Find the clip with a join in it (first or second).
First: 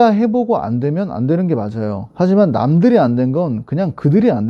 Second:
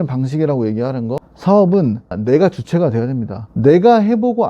second